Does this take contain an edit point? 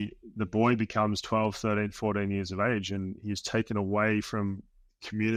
no; 0 cuts

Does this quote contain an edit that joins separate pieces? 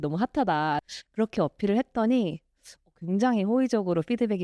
yes; 1 cut; at 0.9 s

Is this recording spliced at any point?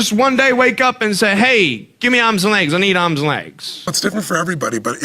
yes; 1 cut; at 3.9 s

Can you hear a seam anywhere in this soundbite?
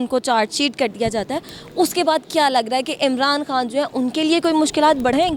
no; 0 cuts

